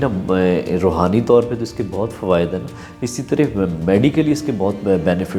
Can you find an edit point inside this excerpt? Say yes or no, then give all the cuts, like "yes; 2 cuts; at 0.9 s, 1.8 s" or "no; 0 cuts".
no; 0 cuts